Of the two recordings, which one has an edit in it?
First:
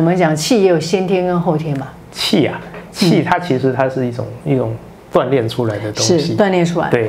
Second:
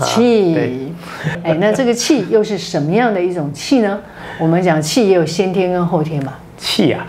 second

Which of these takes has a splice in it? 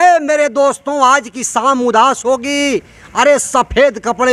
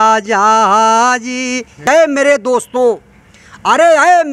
second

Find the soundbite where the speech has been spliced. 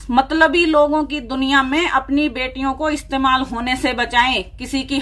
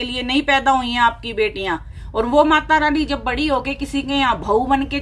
second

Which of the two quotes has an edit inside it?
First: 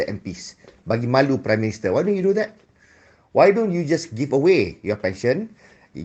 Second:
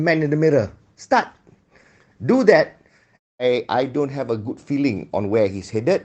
second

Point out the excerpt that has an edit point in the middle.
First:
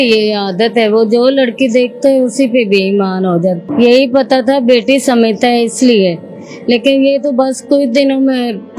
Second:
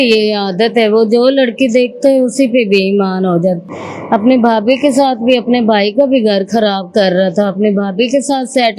first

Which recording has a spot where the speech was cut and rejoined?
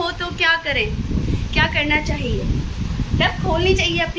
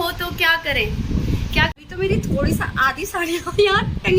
second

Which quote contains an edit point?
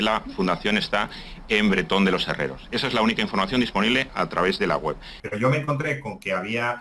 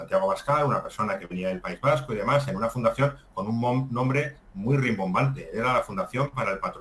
first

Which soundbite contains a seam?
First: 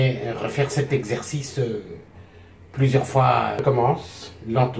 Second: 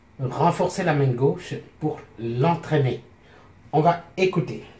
first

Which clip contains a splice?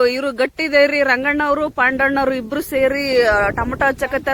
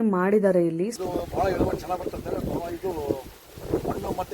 second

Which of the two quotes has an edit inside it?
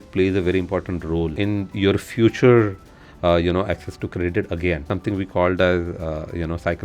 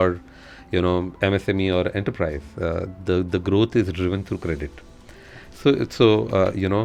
first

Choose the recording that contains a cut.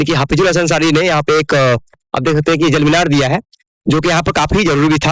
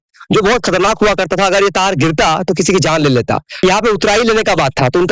second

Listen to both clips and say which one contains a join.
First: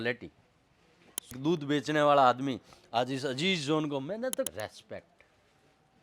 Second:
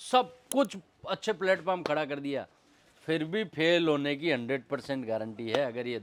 first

